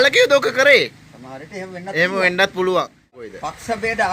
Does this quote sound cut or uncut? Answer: cut